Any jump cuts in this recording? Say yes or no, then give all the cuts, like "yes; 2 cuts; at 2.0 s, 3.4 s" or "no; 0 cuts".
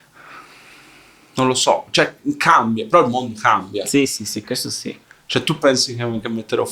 no; 0 cuts